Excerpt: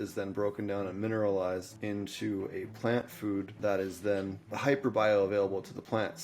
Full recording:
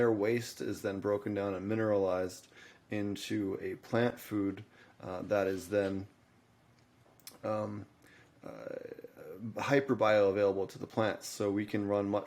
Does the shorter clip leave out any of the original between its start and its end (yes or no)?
yes